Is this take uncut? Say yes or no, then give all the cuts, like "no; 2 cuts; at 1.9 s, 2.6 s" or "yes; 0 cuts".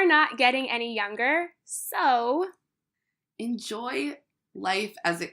yes; 0 cuts